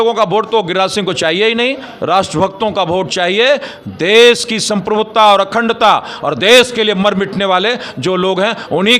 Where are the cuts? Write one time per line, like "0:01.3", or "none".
0:01.9